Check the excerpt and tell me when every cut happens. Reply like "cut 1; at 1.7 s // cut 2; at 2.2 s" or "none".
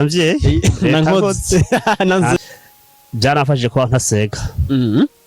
cut 1; at 2.4 s